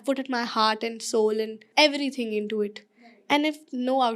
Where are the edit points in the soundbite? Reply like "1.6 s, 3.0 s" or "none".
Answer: 1.6 s